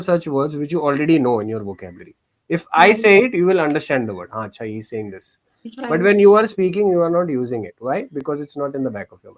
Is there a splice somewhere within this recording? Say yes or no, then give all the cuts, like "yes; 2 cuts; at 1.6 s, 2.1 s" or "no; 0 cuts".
no; 0 cuts